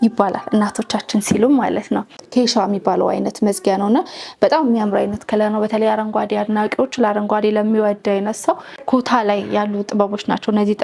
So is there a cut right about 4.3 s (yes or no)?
no